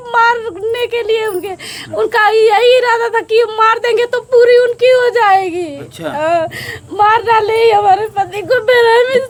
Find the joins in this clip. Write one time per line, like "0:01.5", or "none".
none